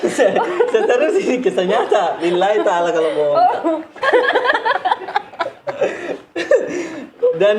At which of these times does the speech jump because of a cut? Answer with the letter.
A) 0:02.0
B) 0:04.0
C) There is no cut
B